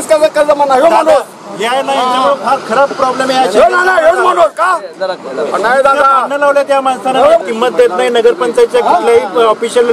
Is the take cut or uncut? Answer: uncut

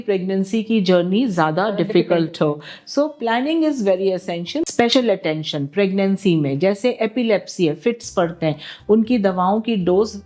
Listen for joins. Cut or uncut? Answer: cut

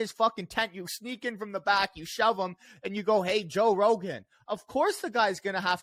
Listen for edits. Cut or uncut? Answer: uncut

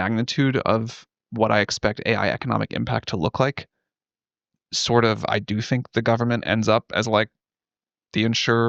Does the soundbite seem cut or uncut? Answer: uncut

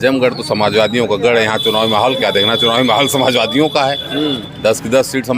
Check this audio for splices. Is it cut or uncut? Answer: uncut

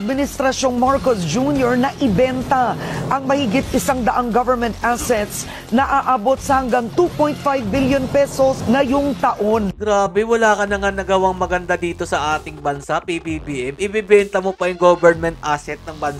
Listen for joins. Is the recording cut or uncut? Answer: uncut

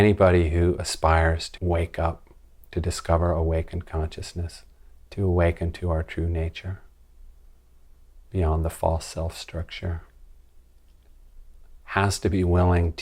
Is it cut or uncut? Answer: cut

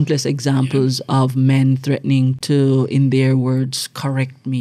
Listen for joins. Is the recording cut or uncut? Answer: uncut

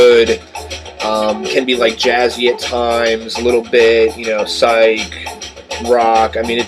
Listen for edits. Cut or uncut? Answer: uncut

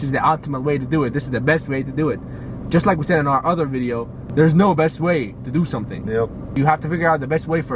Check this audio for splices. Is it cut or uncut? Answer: cut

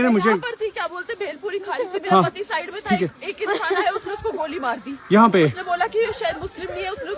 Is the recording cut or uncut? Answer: uncut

